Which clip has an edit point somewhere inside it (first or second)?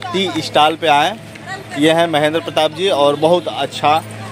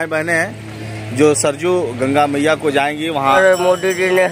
second